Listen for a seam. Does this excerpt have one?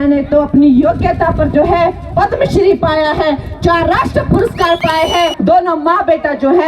yes; 1 cut; at 5.3 s

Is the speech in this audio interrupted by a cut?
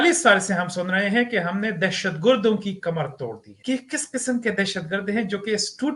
yes; 1 cut; at 3.5 s

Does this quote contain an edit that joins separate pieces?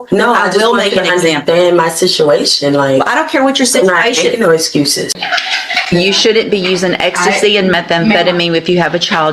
yes; 1 cut; at 5.2 s

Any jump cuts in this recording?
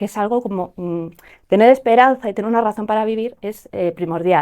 no; 0 cuts

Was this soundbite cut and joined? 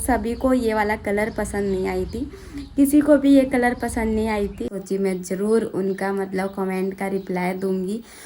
yes; 1 cut; at 4.7 s

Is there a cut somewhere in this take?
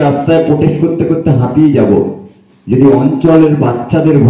no; 0 cuts

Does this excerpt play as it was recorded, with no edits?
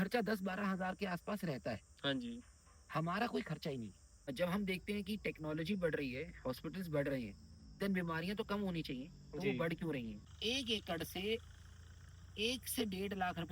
no; 2 cuts; at 4.3 s, 10.3 s

